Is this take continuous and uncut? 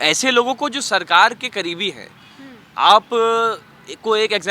yes; 0 cuts

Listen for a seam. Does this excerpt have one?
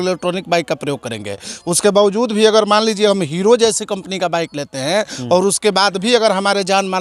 no; 0 cuts

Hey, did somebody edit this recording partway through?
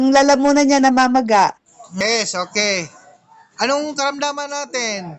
yes; 1 cut; at 2.0 s

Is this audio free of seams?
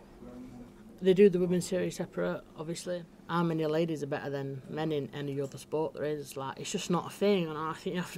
no; 1 cut; at 2.8 s

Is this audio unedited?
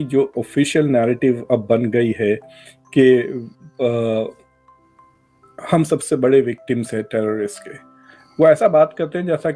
yes; 0 cuts

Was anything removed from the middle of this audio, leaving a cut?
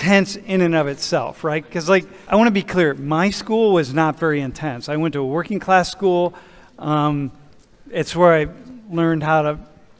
no; 0 cuts

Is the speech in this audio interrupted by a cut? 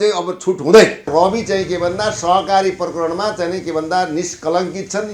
yes; 1 cut; at 1.1 s

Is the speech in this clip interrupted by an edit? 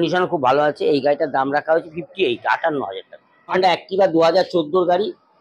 yes; 1 cut; at 3.5 s

